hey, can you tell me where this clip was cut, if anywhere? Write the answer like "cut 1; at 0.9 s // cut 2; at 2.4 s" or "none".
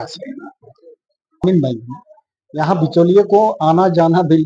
cut 1; at 1.4 s